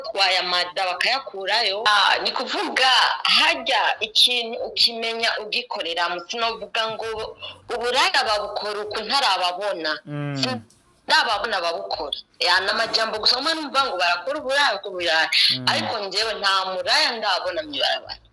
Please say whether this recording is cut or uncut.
cut